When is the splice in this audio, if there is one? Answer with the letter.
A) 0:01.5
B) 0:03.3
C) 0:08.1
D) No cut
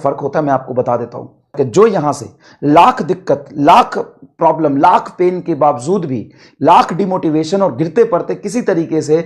A